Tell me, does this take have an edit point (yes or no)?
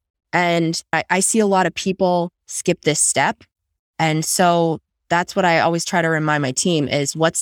yes